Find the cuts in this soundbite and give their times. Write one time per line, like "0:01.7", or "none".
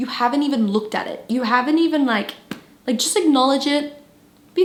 none